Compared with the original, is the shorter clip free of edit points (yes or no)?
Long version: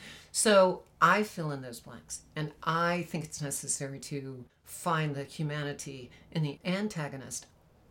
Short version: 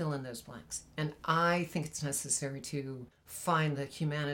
yes